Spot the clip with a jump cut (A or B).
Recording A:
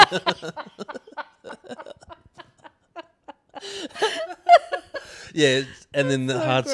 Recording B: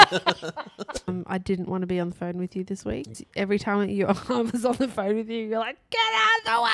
B